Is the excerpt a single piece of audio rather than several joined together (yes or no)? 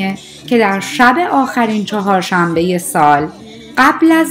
yes